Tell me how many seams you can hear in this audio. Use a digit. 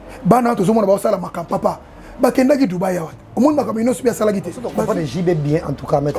1